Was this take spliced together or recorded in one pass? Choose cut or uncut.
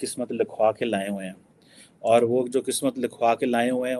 uncut